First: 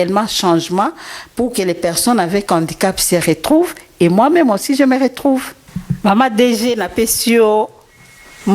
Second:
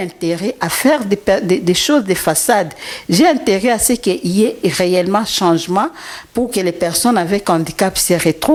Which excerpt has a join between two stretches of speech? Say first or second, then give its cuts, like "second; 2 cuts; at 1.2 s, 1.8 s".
first; 1 cut; at 5.5 s